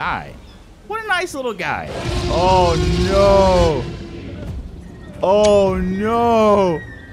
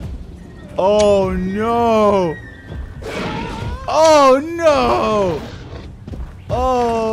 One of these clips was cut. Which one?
first; 1 cut; at 2.0 s

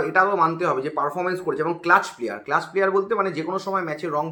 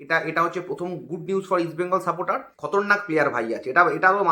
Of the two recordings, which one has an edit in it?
second; 1 cut; at 2.5 s

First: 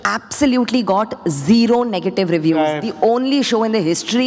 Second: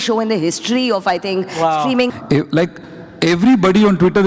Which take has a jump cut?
second; 1 cut; at 2.1 s

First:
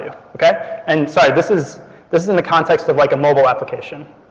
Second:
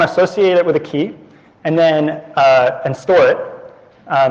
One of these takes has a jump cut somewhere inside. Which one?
second; 1 cut; at 2.8 s

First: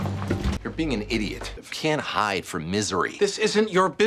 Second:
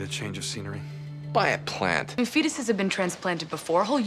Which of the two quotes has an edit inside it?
second; 1 cut; at 2.1 s

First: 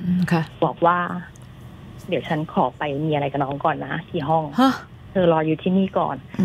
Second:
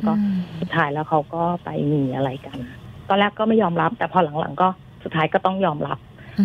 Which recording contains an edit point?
second; 1 cut; at 2.9 s

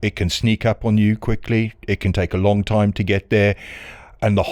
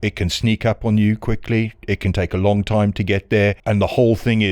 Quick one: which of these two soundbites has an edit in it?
second; 1 cut; at 3.6 s

